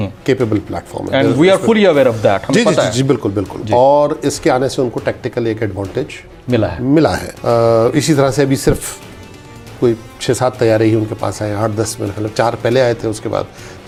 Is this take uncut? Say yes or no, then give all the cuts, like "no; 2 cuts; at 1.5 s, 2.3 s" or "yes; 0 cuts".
yes; 0 cuts